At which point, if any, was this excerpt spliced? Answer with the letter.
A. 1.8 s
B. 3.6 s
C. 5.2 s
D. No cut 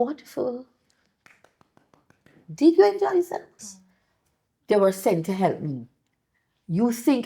B